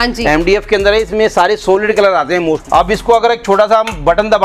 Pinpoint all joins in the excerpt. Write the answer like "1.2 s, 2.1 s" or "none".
2.6 s